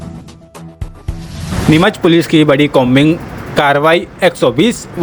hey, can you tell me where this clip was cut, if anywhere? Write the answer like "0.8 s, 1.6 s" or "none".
1.5 s